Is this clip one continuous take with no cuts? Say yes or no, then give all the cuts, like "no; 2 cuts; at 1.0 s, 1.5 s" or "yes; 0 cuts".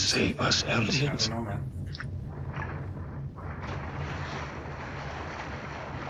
yes; 0 cuts